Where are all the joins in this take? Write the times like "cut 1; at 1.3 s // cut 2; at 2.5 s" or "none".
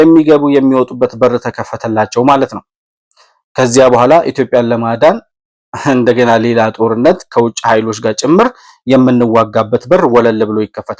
none